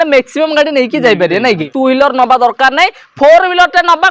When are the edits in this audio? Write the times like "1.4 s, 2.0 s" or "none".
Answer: 1.7 s